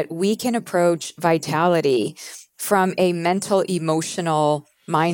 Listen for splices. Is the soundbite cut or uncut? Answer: uncut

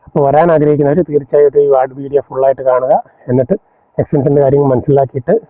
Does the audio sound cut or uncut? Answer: uncut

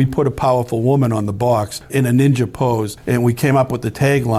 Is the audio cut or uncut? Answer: cut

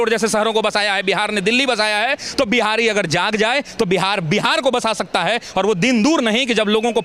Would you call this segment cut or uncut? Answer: uncut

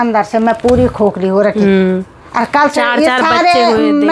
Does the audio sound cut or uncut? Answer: uncut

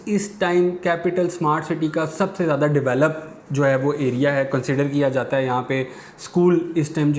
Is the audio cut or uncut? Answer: uncut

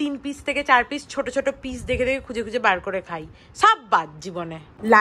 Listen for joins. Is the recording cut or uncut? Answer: uncut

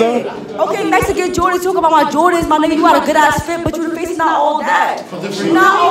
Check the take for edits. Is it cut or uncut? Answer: uncut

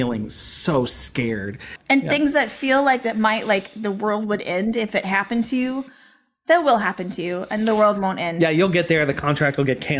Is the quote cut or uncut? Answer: cut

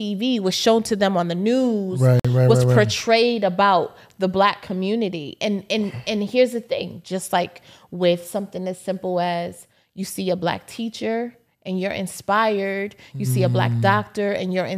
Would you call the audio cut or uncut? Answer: uncut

